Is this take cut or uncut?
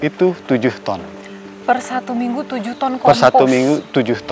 uncut